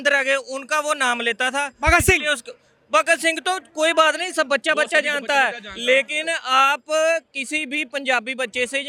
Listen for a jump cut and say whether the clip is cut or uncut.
uncut